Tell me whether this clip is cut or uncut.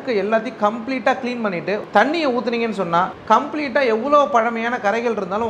cut